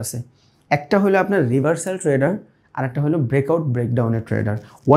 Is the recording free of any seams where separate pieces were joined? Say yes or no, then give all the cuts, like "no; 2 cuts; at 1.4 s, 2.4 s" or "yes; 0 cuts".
yes; 0 cuts